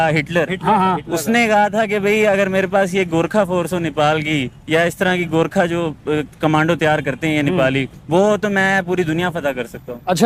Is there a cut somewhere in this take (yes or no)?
no